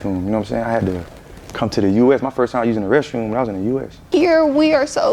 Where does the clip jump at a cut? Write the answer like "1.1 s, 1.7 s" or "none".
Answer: 3.9 s